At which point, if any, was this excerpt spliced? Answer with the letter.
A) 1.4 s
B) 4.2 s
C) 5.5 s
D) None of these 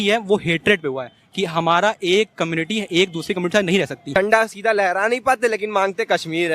B